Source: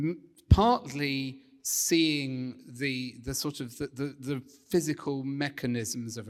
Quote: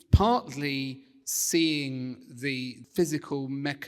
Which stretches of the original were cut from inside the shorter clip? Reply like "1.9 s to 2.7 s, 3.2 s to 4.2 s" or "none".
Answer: 3.2 s to 4.5 s